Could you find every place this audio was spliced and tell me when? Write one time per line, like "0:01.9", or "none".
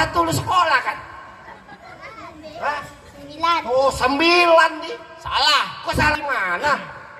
0:06.2